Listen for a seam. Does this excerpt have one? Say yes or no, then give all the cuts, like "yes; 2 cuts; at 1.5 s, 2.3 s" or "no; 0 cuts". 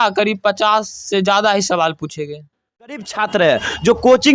yes; 1 cut; at 2.9 s